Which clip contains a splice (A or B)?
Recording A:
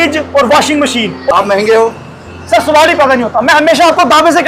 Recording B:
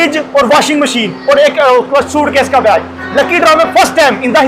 A